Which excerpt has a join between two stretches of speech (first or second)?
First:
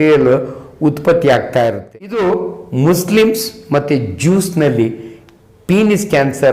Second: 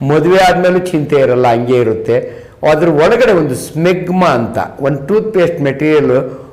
first